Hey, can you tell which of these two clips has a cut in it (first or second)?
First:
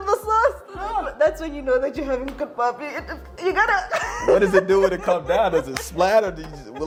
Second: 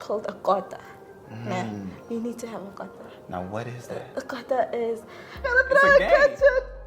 second